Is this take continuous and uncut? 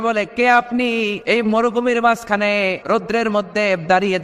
no; 2 cuts; at 1.2 s, 2.8 s

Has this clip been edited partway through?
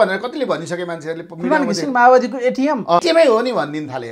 yes; 1 cut; at 3.0 s

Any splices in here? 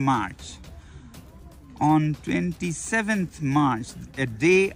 no; 0 cuts

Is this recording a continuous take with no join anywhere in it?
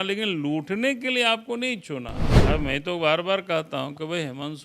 no; 1 cut; at 2.3 s

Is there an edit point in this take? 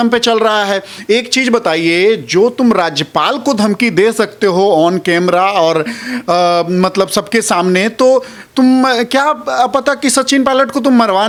no; 0 cuts

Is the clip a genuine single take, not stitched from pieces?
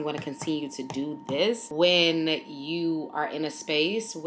yes; 0 cuts

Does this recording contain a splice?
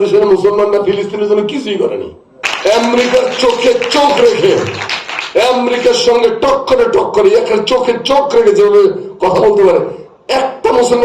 yes; 1 cut; at 2.4 s

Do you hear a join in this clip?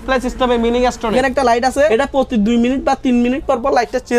yes; 2 cuts; at 1.1 s, 1.9 s

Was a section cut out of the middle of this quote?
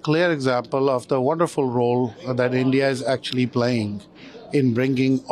no; 0 cuts

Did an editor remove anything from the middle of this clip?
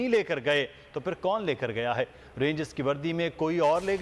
no; 0 cuts

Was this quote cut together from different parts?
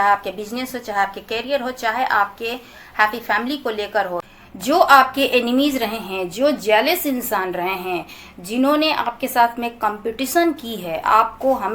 yes; 1 cut; at 4.4 s

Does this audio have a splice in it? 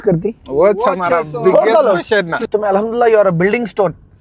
yes; 1 cut; at 2.4 s

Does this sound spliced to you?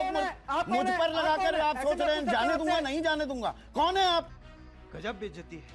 no; 0 cuts

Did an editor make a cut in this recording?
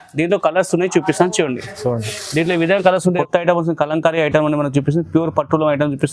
yes; 1 cut; at 3.2 s

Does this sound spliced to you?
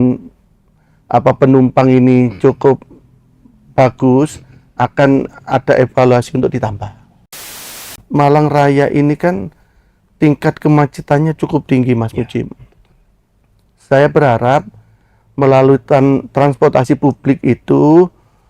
yes; 1 cut; at 7.5 s

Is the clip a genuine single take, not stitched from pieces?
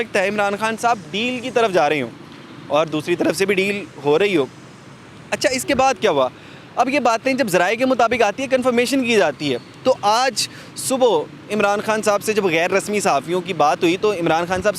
yes; 0 cuts

